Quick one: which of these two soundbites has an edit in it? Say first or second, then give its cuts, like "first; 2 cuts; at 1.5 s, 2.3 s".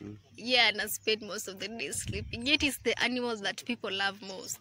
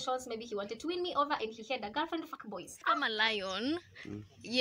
second; 1 cut; at 2.4 s